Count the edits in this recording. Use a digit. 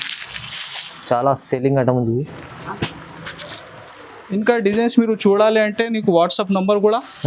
0